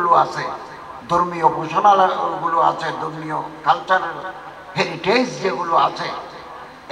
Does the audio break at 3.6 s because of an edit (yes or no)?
no